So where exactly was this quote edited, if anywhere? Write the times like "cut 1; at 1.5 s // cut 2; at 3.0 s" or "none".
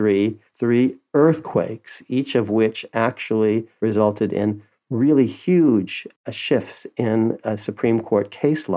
cut 1; at 3.7 s // cut 2; at 6.2 s